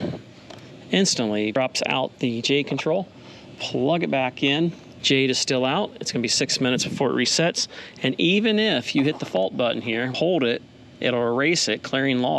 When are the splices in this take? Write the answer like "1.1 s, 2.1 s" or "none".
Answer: 4.9 s, 10.1 s